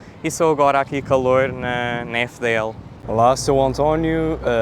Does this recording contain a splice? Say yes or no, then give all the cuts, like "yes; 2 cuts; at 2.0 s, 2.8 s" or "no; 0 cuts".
yes; 1 cut; at 2.8 s